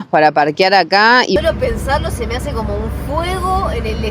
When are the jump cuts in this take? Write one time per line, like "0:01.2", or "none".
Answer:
0:01.4

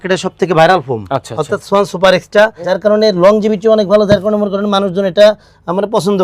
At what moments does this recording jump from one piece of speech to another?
0:02.7

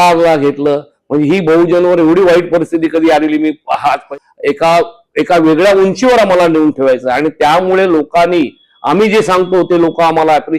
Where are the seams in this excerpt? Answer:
0:04.0

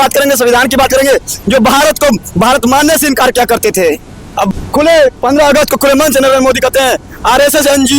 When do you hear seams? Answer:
0:04.5

